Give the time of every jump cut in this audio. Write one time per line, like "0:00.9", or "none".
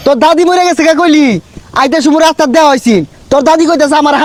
none